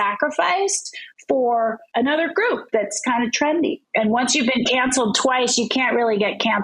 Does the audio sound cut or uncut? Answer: cut